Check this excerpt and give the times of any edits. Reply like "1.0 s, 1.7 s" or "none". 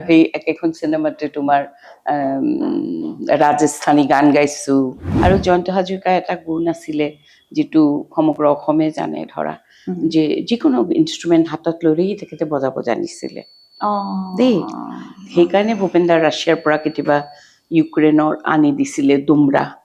5.1 s